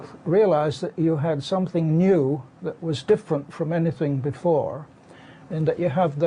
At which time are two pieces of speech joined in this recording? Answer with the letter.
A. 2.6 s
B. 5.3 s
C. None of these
A